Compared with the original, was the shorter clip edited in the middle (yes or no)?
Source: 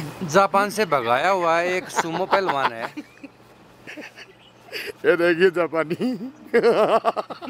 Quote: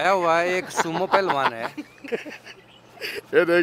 yes